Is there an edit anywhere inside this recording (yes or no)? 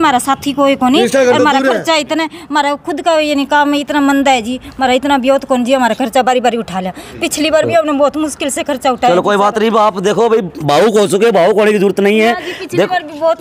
no